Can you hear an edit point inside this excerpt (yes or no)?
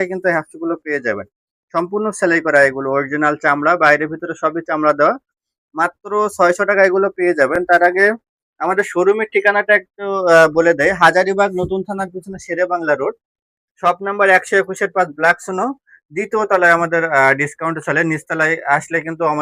no